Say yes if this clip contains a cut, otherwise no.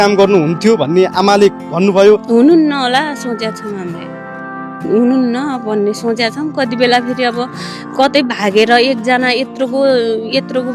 yes